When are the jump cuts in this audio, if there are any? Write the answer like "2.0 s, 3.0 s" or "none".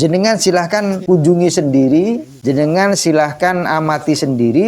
1.0 s, 2.3 s